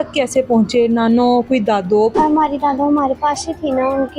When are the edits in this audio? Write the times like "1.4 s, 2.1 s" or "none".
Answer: 2.1 s